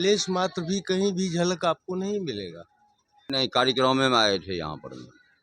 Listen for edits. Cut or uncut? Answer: cut